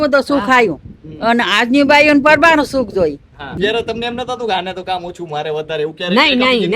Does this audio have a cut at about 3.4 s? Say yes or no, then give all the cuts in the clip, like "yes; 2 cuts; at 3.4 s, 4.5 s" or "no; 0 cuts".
yes; 1 cut; at 3.4 s